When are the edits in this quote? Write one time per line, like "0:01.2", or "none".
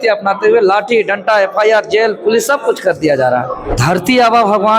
0:03.7